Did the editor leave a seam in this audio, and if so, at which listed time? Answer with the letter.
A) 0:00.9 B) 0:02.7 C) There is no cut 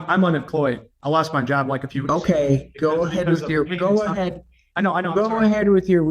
A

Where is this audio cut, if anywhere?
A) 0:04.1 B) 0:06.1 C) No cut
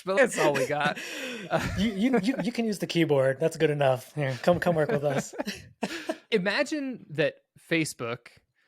B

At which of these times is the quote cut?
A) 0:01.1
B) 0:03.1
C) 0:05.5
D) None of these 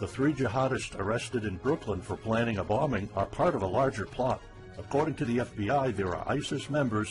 C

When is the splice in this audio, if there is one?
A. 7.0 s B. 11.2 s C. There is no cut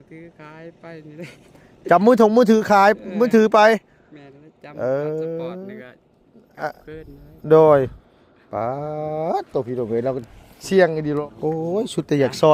B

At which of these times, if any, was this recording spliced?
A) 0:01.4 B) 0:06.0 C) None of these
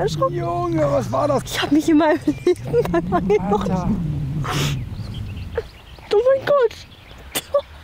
A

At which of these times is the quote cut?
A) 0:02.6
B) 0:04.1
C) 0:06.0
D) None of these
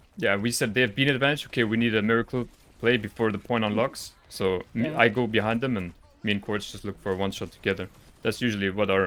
D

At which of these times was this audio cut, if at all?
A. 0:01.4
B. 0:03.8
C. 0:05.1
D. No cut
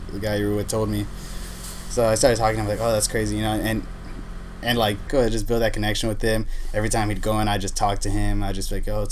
C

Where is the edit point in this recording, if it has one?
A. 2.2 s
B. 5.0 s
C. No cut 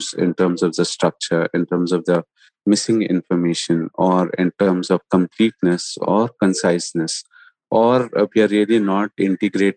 C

